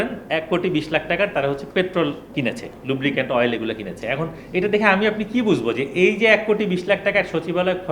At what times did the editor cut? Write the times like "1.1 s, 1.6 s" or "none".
2.2 s

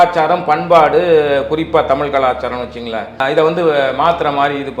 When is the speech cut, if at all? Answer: 3.2 s

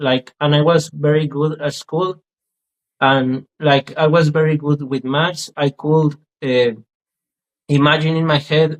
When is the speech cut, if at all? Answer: none

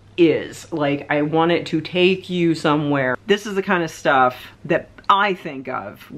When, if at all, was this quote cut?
3.2 s

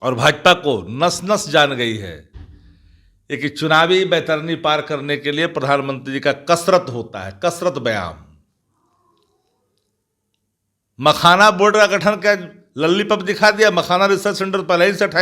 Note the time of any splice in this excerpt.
none

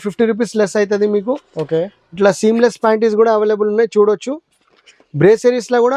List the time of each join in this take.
none

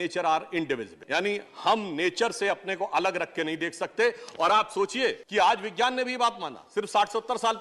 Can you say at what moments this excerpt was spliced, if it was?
0.9 s, 5.2 s

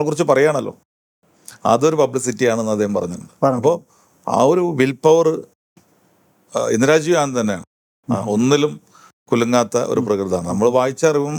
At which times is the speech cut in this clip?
none

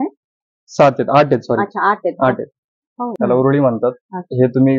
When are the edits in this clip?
3.1 s

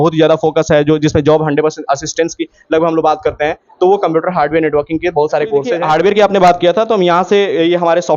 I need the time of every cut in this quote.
5.7 s

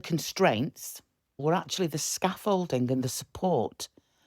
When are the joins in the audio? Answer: 1.4 s

